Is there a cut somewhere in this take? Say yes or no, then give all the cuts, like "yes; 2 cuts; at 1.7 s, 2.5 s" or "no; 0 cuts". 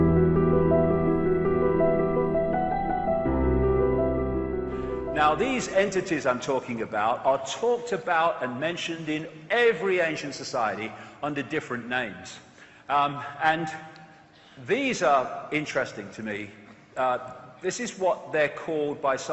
no; 0 cuts